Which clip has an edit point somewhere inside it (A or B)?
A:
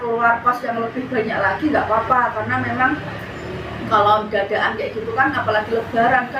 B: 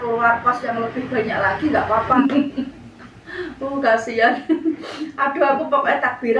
B